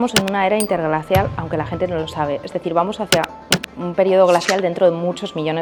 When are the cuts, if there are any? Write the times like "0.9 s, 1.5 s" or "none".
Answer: none